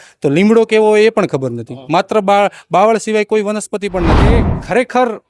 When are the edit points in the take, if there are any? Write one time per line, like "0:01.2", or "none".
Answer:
0:04.3